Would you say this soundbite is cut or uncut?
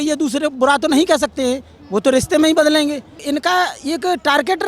cut